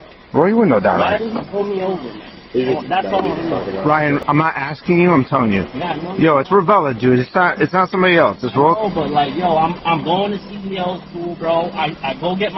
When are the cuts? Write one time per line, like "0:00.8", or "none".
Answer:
0:03.8